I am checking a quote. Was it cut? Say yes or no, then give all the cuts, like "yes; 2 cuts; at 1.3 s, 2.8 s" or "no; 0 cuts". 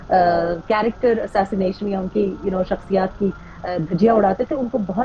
no; 0 cuts